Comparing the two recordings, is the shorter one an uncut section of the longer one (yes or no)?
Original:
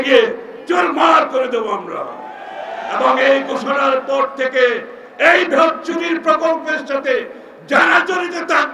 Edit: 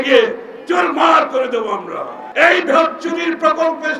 no